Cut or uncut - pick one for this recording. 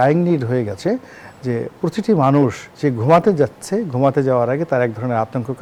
uncut